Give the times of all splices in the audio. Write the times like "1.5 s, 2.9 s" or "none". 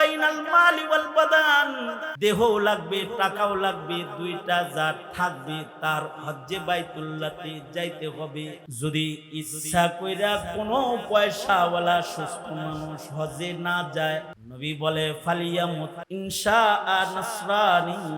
2.0 s, 8.7 s, 14.4 s, 16.0 s